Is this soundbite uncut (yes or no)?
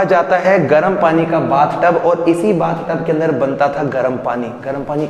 yes